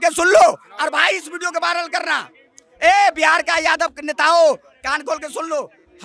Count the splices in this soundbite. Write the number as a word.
zero